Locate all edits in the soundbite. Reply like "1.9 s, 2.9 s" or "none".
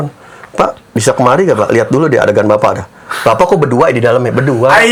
none